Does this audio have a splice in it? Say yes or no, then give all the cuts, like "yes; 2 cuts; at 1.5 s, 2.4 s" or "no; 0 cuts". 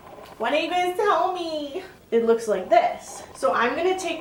no; 0 cuts